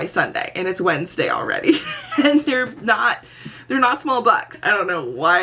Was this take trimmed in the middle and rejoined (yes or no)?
yes